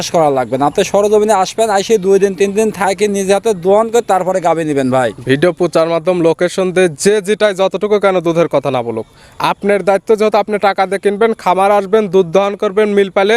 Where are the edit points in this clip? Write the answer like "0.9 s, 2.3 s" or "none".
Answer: none